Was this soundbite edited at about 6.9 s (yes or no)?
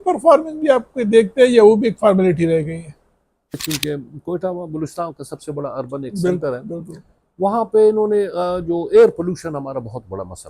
no